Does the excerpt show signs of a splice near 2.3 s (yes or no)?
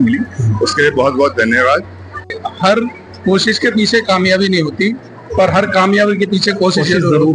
yes